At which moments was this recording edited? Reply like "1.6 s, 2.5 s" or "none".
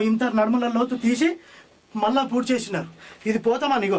3.0 s